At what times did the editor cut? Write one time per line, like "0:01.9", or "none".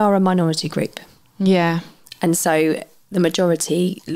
none